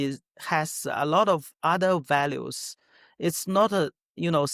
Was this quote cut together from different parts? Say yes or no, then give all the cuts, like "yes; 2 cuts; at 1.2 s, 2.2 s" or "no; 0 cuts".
no; 0 cuts